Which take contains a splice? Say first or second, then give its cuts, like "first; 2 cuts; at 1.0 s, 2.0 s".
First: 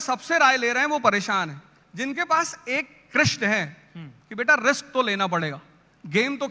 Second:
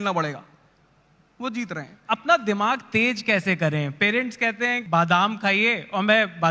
second; 2 cuts; at 2.0 s, 4.8 s